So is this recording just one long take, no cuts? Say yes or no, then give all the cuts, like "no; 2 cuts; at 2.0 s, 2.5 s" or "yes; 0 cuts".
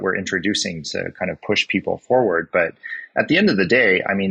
yes; 0 cuts